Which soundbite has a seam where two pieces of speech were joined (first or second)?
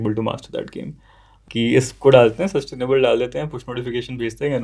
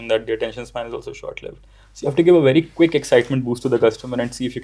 first